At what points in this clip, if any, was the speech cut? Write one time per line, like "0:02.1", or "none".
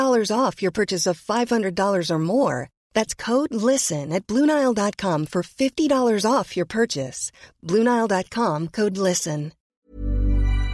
0:09.7